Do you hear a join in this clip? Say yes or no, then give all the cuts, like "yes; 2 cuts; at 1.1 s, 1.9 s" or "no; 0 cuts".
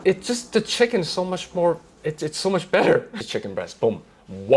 yes; 1 cut; at 3.2 s